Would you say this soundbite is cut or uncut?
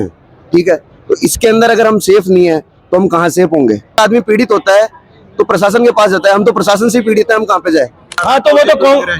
cut